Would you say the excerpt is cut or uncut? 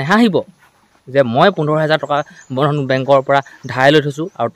uncut